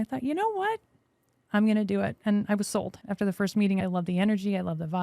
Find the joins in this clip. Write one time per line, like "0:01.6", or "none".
0:03.8